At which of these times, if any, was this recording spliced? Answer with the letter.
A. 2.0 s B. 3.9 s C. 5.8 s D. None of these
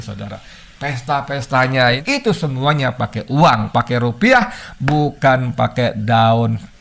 A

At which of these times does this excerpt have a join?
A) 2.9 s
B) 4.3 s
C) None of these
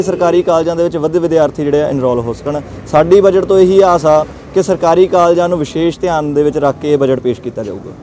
C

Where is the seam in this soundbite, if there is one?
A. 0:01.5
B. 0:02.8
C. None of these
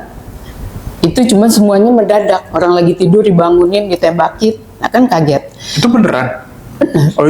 C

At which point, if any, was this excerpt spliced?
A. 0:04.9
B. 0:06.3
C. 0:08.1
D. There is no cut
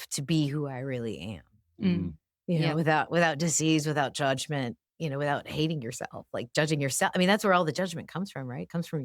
A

